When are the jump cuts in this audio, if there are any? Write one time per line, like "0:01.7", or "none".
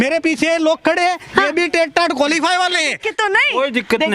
0:03.1

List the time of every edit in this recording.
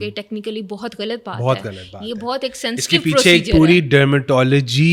none

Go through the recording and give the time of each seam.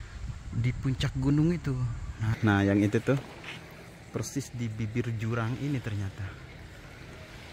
0:02.3

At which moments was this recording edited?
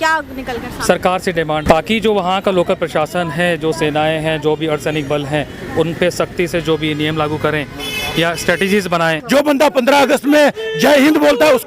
0:01.7
0:09.2

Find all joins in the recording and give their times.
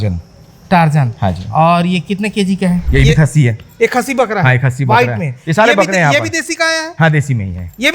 0:02.9

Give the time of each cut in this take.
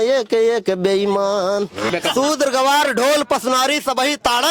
0:01.9

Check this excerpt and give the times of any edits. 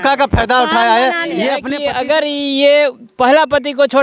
0:01.7

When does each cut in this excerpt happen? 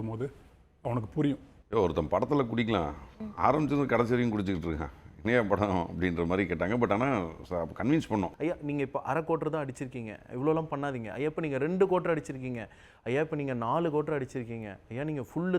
0:01.5
0:08.3

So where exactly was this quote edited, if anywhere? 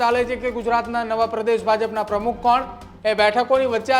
0:02.8

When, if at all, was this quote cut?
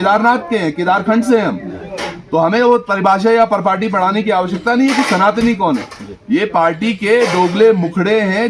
none

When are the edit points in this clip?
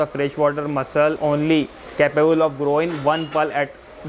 0:01.2

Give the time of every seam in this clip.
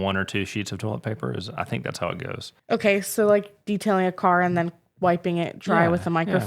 0:02.5

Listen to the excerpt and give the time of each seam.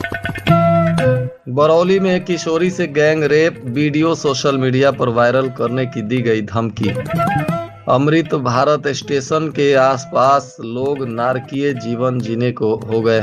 0:01.4

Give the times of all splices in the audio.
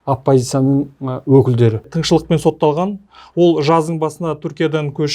0:01.9

